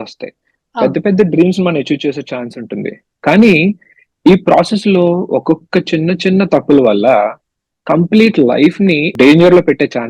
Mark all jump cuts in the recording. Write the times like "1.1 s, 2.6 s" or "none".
9.1 s